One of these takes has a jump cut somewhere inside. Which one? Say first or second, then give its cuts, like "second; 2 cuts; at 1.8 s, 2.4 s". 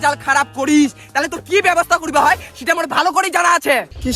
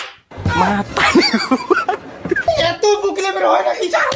second; 1 cut; at 2.5 s